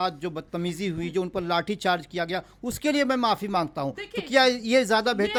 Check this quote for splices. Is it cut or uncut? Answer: uncut